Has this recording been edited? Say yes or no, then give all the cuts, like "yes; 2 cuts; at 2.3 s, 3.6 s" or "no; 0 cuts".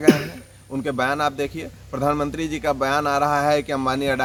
no; 0 cuts